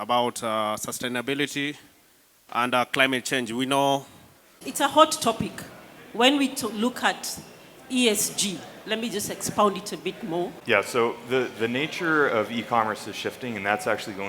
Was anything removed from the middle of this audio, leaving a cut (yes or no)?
yes